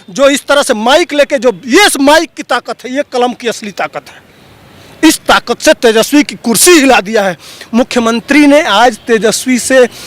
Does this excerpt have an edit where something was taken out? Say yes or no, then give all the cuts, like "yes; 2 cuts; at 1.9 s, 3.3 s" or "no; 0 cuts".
no; 0 cuts